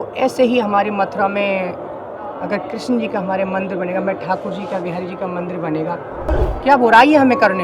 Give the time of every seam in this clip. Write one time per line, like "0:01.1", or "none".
0:06.3